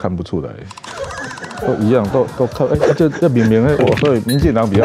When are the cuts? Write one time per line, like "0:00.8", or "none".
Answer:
0:03.8